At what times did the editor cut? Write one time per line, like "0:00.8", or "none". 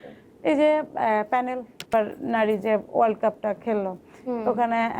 0:01.9